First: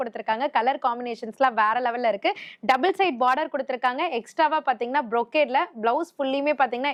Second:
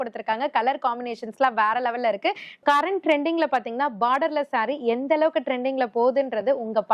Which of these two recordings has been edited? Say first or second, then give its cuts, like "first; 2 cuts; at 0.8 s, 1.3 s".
second; 1 cut; at 2.6 s